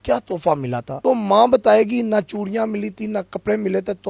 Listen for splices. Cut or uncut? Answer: cut